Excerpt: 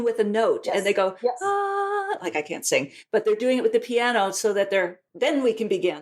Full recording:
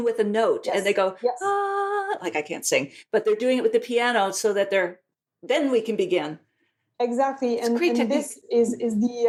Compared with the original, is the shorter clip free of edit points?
no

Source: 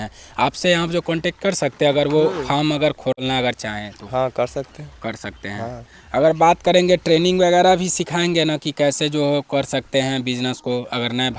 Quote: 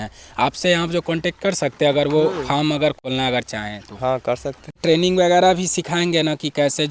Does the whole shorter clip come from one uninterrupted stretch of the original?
no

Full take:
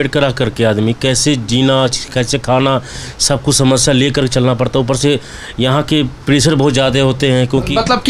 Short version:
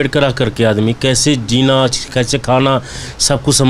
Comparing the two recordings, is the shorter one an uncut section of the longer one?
yes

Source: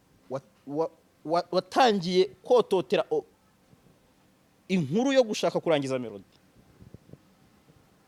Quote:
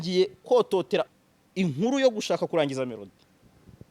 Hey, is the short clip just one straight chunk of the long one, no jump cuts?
no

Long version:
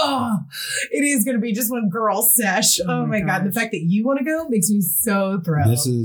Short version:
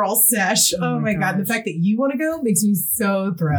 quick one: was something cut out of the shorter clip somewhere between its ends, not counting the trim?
no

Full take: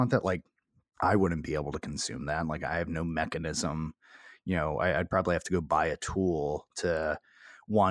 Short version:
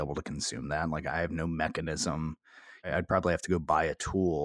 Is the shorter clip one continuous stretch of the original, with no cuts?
no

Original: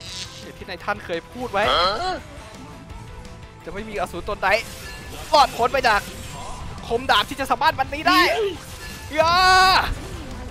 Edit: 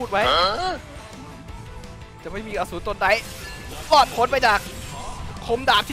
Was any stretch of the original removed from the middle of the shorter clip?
no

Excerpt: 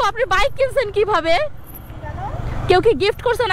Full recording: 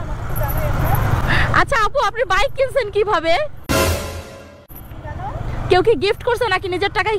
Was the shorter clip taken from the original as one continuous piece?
no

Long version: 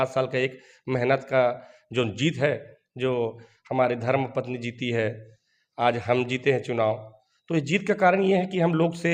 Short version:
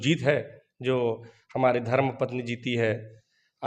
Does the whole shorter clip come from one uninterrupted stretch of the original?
yes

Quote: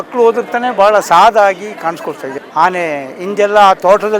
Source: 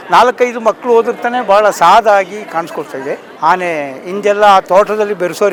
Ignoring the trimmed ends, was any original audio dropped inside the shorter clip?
yes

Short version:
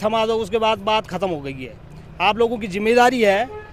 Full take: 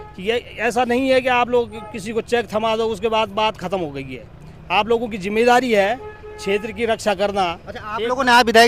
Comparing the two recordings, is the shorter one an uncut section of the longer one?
yes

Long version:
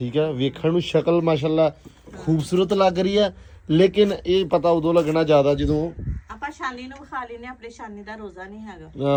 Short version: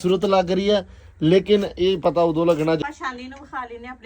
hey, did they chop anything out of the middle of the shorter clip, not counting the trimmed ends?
yes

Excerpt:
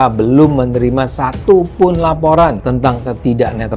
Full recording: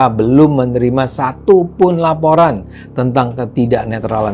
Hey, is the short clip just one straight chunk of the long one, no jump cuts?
no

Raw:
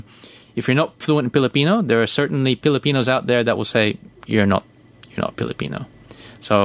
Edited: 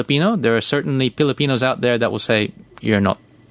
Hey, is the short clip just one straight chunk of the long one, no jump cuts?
yes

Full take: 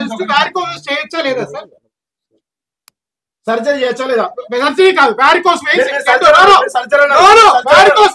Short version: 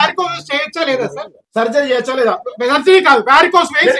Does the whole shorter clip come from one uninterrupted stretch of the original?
no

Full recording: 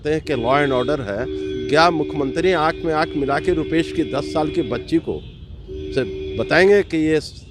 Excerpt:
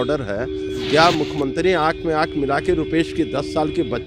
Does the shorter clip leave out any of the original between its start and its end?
no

